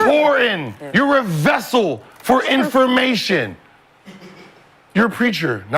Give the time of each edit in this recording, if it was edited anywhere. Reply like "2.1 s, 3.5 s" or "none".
none